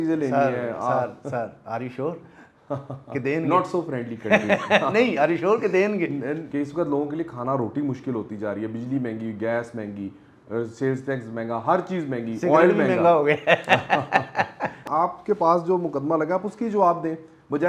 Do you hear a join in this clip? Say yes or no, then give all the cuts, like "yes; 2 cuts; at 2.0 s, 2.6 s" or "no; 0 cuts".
yes; 2 cuts; at 6.4 s, 14.8 s